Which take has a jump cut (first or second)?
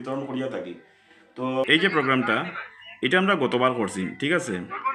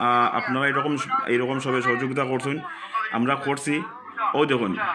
first